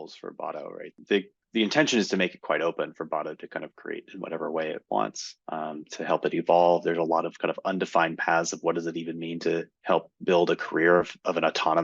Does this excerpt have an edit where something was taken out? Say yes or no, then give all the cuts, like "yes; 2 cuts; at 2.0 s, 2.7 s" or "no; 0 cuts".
yes; 1 cut; at 1.0 s